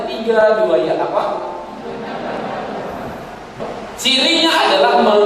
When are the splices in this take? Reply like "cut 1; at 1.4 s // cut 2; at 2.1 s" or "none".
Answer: cut 1; at 3.6 s